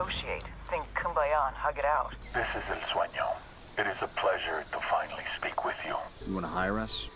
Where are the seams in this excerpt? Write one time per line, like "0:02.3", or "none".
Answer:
0:02.2
0:06.1

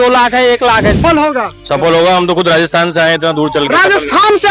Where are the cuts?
0:01.0

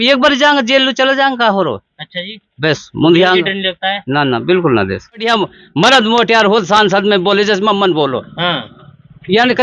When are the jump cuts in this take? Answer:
0:05.2

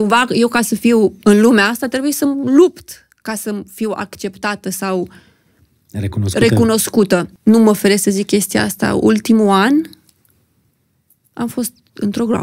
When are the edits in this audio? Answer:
0:07.3

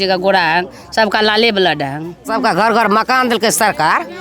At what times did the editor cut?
0:02.2

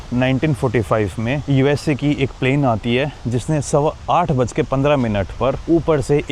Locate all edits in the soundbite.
none

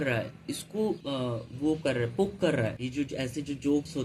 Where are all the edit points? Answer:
0:01.0
0:02.8

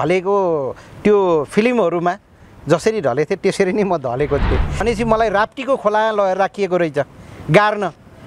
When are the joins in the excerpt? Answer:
0:04.8

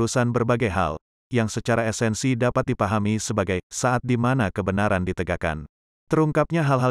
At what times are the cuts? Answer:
0:05.9

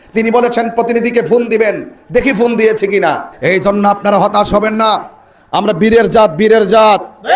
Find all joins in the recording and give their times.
0:03.3

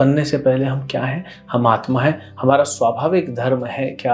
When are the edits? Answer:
none

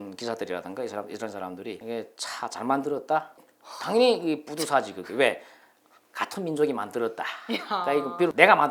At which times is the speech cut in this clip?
none

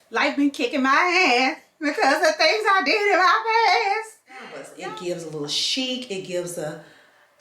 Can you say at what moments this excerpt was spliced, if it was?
0:04.7

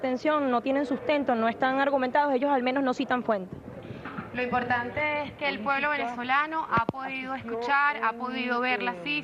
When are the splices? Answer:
none

